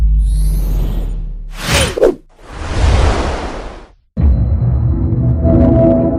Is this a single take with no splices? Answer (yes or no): yes